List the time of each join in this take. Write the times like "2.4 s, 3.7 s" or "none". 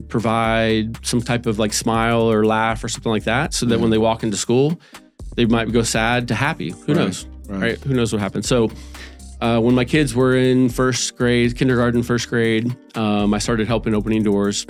none